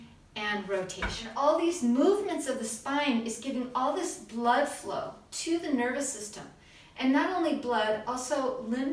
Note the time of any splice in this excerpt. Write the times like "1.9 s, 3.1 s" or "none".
1.2 s